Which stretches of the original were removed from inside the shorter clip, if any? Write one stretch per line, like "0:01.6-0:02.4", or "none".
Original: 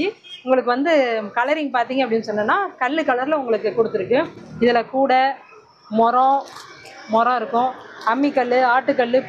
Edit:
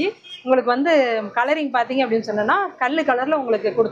none